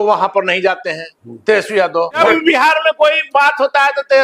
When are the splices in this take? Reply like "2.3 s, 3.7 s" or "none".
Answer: 2.2 s